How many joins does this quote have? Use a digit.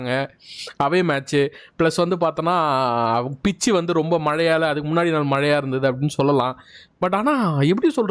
0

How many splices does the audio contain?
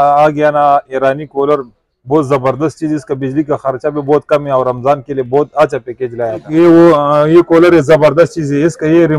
1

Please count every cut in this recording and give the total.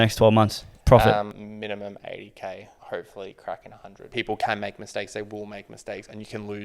3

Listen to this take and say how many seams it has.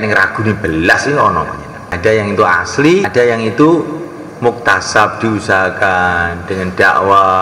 2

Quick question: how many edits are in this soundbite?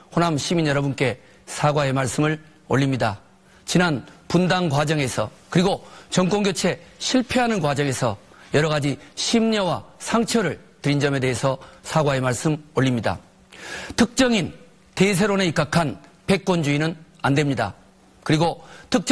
1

